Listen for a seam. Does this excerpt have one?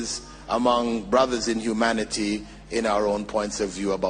no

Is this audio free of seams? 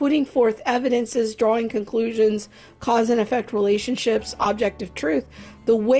yes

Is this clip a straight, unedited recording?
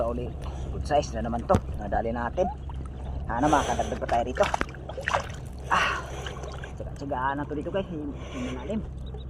yes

